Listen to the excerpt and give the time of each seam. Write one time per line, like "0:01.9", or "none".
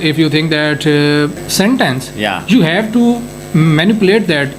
0:01.4